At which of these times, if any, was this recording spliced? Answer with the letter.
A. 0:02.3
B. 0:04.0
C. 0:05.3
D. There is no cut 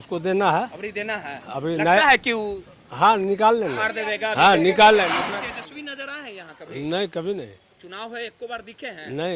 C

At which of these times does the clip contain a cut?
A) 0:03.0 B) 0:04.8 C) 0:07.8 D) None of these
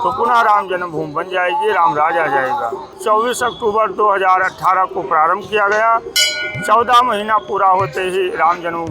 A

